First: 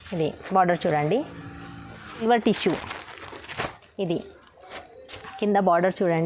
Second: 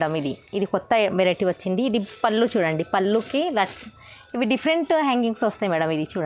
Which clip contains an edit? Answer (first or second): first